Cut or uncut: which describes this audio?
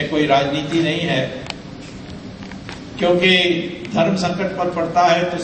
uncut